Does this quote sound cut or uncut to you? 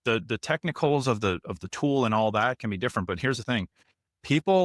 uncut